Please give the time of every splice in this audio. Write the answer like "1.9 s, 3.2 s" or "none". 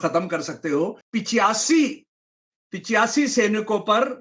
1.0 s